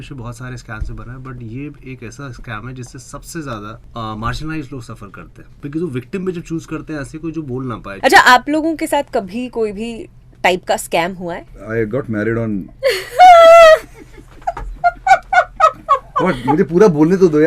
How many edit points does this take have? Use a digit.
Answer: 4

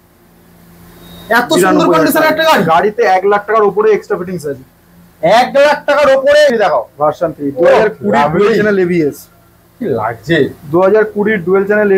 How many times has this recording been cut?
1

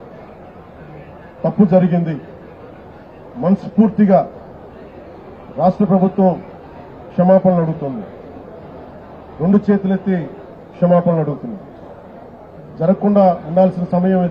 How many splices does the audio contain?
0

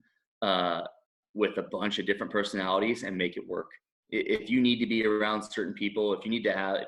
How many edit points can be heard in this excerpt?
0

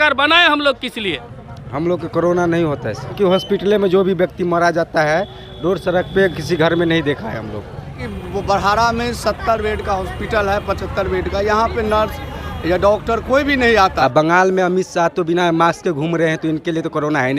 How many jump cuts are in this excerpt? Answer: 4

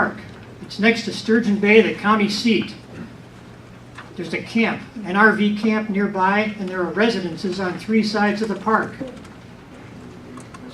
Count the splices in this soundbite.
1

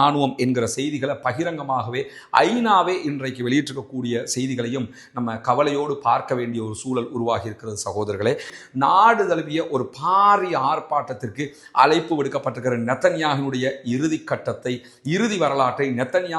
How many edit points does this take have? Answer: 1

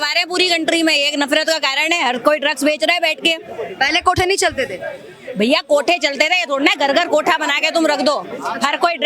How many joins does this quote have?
0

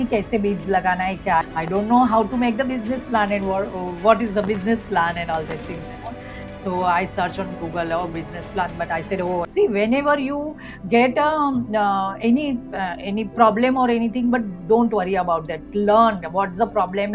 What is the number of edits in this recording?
2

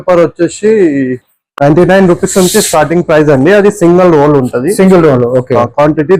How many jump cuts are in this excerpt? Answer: 0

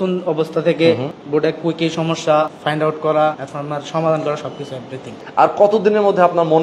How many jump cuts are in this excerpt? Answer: 4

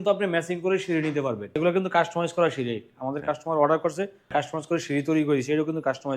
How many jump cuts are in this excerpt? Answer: 2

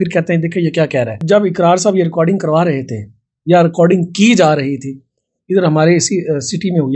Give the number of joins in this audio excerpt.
1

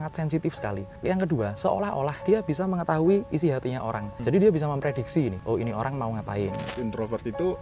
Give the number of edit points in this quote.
5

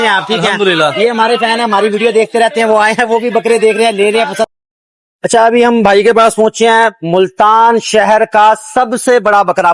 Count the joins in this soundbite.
1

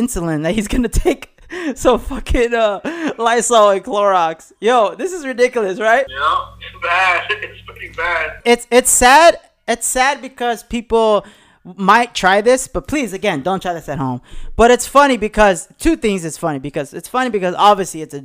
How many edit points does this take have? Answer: 2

